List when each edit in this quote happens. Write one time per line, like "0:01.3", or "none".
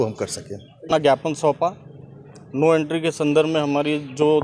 0:01.0